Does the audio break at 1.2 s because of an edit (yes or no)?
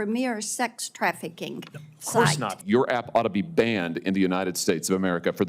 no